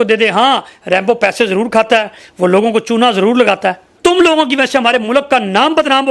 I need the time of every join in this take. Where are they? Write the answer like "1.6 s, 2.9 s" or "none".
3.9 s